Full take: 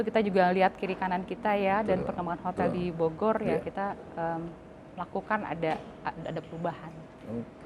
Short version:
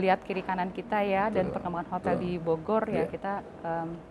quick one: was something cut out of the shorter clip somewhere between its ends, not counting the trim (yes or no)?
no